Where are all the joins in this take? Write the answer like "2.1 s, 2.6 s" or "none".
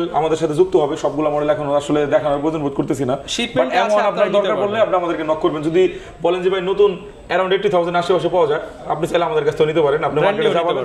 none